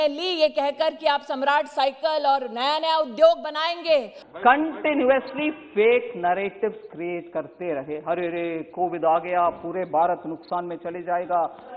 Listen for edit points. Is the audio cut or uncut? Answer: cut